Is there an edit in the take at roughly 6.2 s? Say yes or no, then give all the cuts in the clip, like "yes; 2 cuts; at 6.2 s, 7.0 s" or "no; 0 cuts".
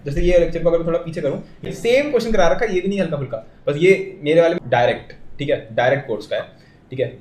no; 2 cuts; at 1.7 s, 4.6 s